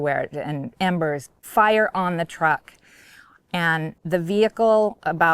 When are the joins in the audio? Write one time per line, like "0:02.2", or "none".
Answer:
0:01.3
0:04.0